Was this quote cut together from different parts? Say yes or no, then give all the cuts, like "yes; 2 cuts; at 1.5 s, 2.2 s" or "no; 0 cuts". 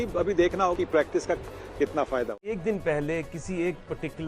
yes; 1 cut; at 2.4 s